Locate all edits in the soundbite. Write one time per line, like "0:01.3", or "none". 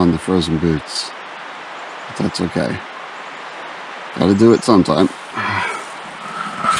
none